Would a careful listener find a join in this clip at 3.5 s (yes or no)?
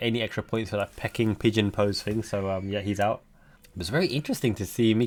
no